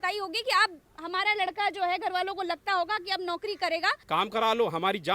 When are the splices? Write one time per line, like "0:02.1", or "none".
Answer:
0:04.0